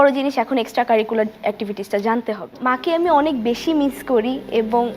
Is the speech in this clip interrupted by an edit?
yes; 1 cut; at 2.6 s

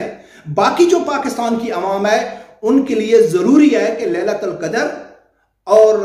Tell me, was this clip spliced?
no; 0 cuts

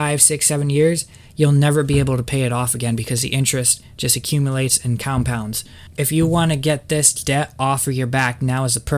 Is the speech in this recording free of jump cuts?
no; 1 cut; at 6.0 s

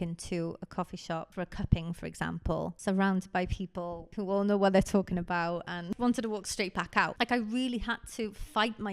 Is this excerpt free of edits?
no; 5 cuts; at 1.3 s, 2.8 s, 4.0 s, 5.9 s, 7.1 s

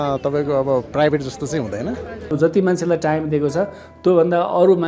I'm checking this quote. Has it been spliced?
yes; 1 cut; at 2.3 s

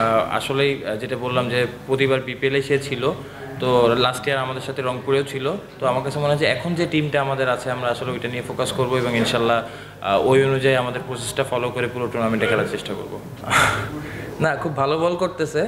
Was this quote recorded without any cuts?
no; 1 cut; at 13.3 s

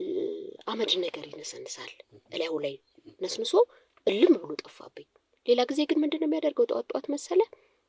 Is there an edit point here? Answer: no; 0 cuts

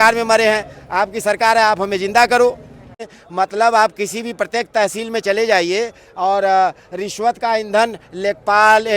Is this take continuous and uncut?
no; 1 cut; at 3.0 s

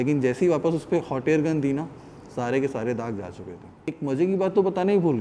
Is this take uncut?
no; 1 cut; at 4.0 s

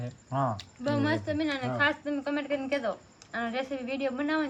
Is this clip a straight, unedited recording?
yes; 0 cuts

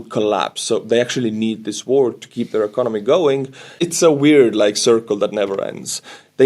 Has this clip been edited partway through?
yes; 1 cut; at 3.8 s

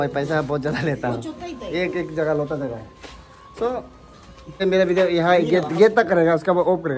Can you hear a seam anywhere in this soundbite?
yes; 1 cut; at 4.6 s

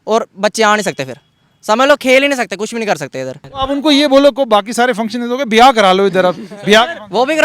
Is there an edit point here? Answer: yes; 1 cut; at 3.4 s

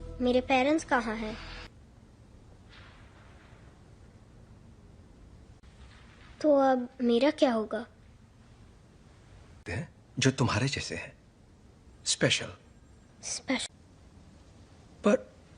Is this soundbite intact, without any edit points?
no; 1 cut; at 1.7 s

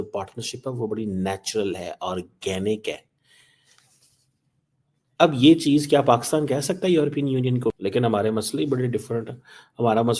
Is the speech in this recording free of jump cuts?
no; 1 cut; at 7.8 s

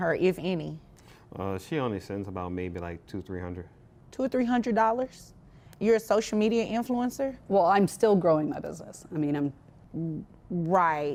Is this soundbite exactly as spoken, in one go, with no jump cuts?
yes; 0 cuts

